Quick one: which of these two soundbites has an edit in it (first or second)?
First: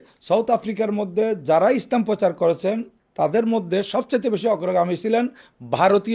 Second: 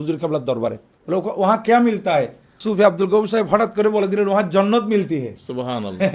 second